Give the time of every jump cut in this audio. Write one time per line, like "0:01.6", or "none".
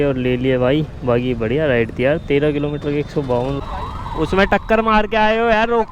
0:03.6